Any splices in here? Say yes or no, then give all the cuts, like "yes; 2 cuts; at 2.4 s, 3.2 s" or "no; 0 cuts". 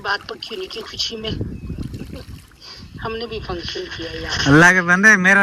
no; 0 cuts